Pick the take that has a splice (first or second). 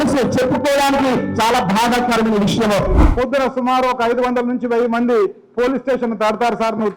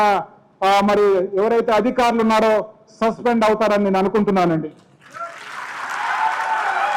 first